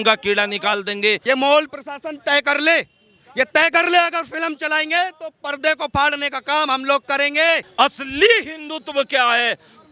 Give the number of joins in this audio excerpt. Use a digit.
2